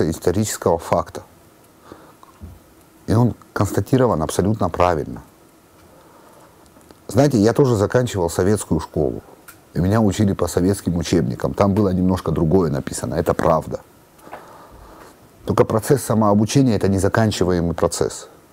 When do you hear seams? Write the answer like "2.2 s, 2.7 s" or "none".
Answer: none